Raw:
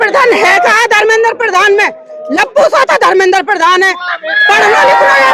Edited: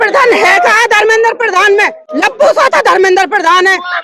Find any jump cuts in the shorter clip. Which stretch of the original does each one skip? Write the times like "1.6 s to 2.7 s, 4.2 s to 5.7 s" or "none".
2.0 s to 2.2 s